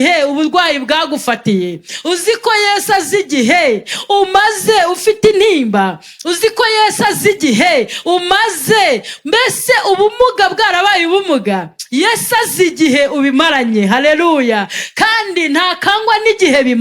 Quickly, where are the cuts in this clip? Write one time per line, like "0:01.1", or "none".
none

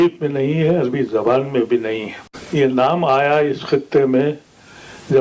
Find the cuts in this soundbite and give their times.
0:02.4

